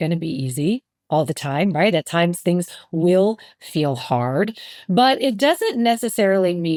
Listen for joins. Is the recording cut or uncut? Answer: uncut